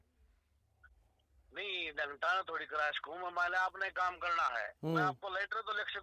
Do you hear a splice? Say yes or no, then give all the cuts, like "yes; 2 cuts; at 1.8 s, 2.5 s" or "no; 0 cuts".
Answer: no; 0 cuts